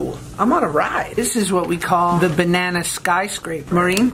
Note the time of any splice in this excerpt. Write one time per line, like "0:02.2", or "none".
0:01.2